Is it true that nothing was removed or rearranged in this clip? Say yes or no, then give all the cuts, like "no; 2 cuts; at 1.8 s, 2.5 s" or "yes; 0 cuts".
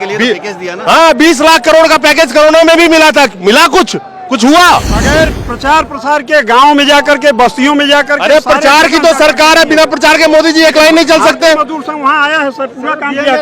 no; 1 cut; at 5.0 s